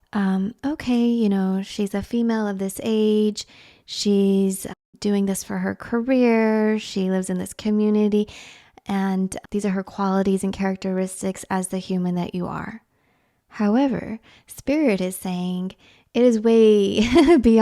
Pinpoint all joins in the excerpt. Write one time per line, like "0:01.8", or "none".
0:04.8
0:09.4